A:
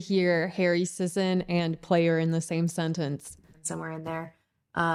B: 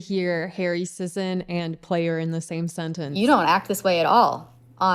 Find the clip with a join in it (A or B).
B